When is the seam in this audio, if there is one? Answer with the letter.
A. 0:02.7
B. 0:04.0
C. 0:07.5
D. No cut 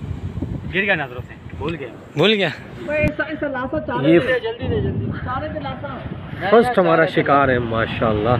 A